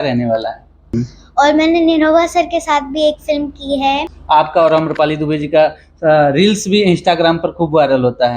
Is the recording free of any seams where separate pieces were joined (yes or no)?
no